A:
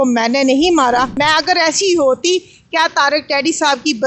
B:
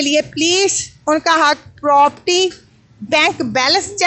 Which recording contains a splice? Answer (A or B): A